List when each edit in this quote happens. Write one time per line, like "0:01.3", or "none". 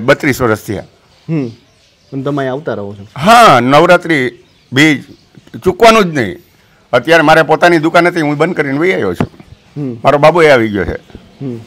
none